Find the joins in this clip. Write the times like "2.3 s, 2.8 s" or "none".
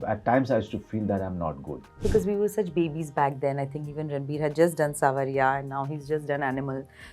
2.0 s